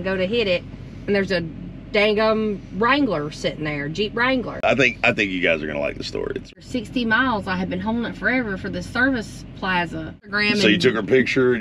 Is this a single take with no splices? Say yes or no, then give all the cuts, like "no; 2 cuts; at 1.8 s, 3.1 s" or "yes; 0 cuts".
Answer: no; 3 cuts; at 4.6 s, 6.5 s, 10.3 s